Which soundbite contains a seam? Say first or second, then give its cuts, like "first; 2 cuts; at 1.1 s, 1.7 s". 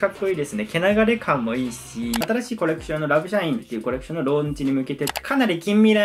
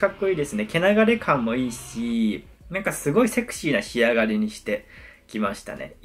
first; 2 cuts; at 2.2 s, 5.2 s